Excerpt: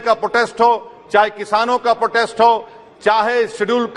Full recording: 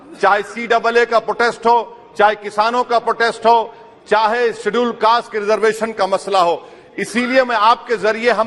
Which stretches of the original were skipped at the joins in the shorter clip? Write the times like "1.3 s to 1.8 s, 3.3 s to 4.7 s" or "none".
none